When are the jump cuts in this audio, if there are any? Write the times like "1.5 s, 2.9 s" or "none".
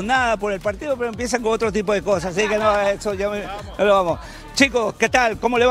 none